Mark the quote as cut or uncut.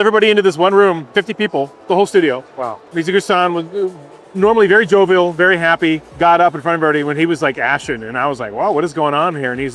uncut